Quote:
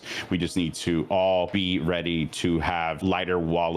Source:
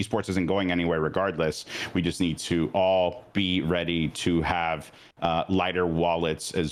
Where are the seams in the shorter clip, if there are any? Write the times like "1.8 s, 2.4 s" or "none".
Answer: 1.5 s, 3.0 s